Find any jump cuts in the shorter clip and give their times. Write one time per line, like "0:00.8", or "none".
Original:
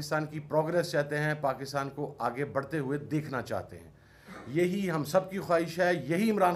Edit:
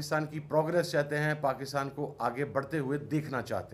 none